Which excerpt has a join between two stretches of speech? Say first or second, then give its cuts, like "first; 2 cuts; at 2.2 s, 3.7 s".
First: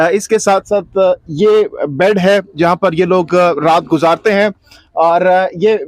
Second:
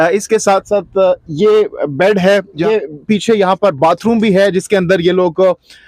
second; 1 cut; at 2.6 s